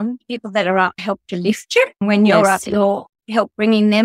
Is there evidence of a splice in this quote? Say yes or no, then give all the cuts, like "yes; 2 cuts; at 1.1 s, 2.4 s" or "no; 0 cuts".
yes; 1 cut; at 2.0 s